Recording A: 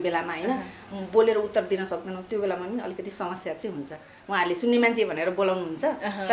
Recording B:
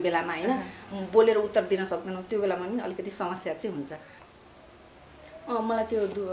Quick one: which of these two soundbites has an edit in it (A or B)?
B